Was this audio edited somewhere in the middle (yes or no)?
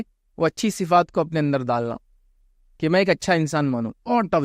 no